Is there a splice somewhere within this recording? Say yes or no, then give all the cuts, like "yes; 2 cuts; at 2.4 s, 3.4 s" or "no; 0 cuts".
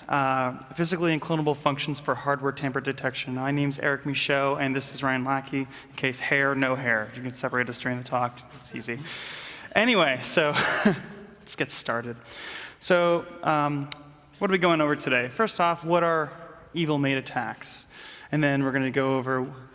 yes; 1 cut; at 6.7 s